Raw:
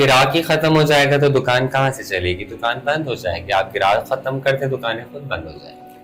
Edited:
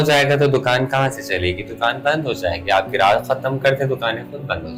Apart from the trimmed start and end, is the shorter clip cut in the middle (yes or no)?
no